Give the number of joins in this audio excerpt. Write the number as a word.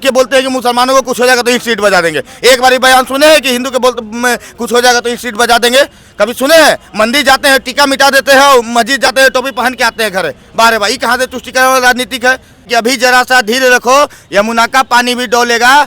one